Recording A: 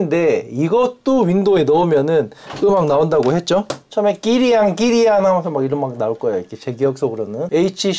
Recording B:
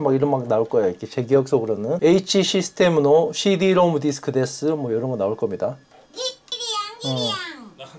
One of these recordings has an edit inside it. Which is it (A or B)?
A